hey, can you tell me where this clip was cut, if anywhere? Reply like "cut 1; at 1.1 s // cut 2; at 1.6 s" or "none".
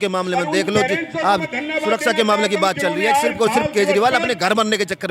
none